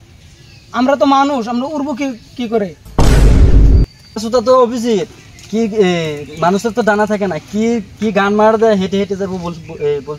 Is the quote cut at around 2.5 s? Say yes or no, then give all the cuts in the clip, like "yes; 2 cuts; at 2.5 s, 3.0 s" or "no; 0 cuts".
yes; 2 cuts; at 2.5 s, 4.3 s